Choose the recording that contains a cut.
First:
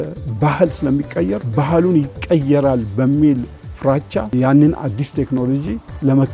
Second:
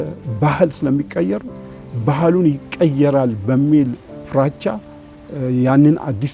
first; 2 cuts; at 1.5 s, 4.3 s

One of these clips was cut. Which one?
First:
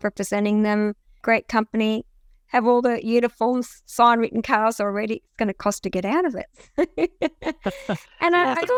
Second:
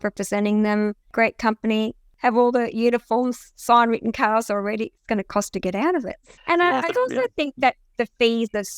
second; 3 cuts; at 1.0 s, 2.0 s, 6.3 s

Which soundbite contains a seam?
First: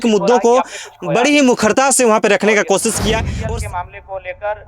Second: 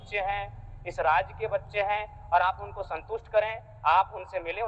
first; 1 cut; at 3.3 s

